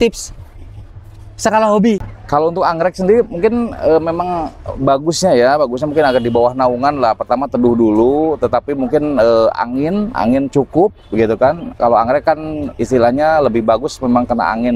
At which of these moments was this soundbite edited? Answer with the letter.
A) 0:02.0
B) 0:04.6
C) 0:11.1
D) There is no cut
A